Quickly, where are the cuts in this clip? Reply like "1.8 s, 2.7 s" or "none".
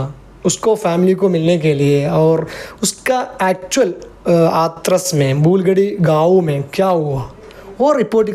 none

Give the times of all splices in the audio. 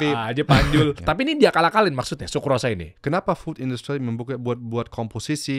1.0 s, 2.9 s

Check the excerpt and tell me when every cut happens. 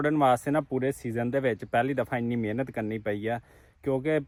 none

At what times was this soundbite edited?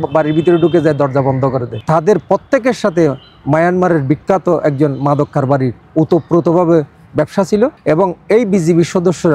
1.7 s, 7.8 s

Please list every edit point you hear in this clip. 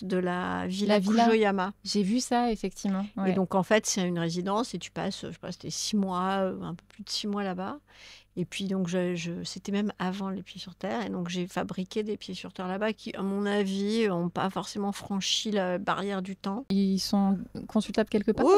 16.7 s

